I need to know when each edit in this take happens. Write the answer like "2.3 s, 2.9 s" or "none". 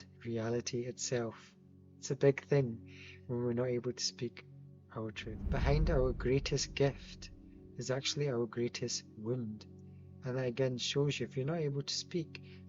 5.4 s